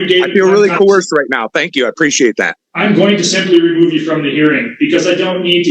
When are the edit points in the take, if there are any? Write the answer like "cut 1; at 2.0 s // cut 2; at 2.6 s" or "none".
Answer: cut 1; at 2.5 s